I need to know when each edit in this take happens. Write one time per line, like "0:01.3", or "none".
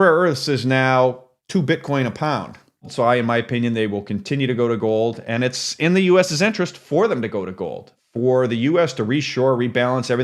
0:01.3
0:02.8
0:07.9